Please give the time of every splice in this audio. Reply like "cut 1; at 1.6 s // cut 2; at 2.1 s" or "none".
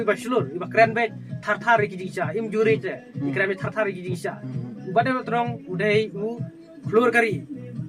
none

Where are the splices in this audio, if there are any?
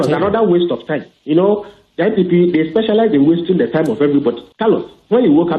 cut 1; at 4.5 s

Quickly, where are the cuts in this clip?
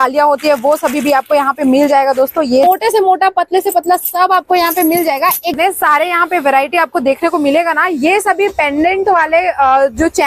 cut 1; at 2.6 s // cut 2; at 5.5 s

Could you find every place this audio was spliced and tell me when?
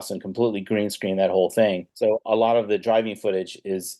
cut 1; at 1.9 s

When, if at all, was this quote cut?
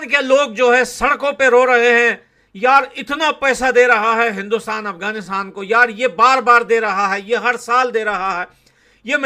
cut 1; at 3.9 s

